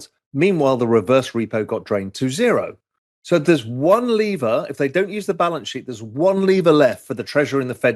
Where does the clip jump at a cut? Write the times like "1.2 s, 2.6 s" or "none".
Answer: 2.8 s

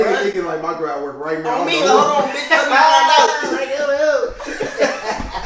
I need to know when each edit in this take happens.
none

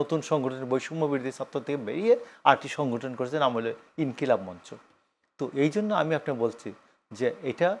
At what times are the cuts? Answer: none

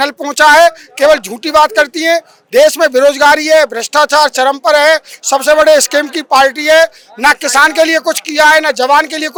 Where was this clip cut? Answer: none

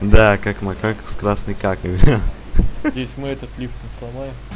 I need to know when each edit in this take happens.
2.9 s

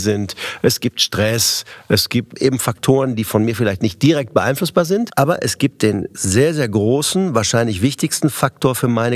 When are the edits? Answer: 2.3 s, 5.1 s

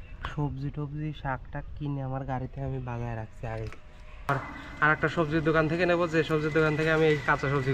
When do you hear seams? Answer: 4.3 s

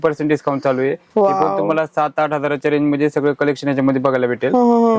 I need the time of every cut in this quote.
none

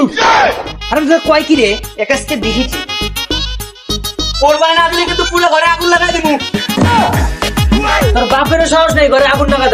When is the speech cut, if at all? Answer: none

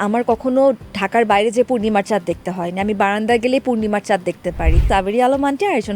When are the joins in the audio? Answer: 4.8 s

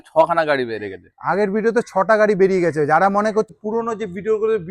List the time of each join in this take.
3.5 s

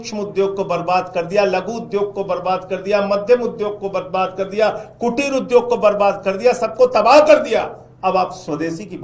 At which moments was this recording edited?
none

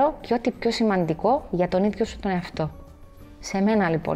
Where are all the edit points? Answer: none

